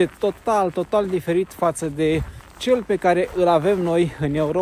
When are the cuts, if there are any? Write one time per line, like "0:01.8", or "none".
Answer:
none